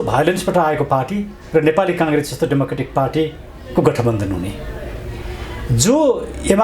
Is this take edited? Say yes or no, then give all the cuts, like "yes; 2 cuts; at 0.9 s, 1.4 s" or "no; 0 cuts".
no; 0 cuts